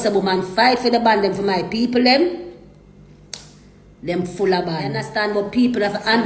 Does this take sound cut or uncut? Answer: cut